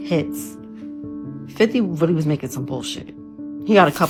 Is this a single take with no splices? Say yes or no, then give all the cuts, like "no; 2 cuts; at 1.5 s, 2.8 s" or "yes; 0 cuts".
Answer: yes; 0 cuts